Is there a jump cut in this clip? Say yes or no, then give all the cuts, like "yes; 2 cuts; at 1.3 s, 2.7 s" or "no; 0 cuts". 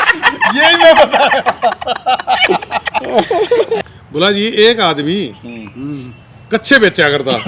yes; 1 cut; at 3.8 s